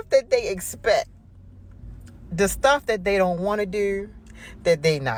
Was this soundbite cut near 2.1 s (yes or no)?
no